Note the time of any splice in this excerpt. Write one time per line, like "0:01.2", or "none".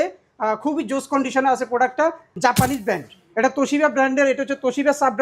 0:02.3